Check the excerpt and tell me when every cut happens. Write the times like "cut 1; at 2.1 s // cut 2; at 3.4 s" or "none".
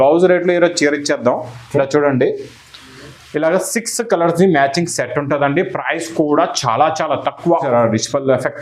cut 1; at 7.5 s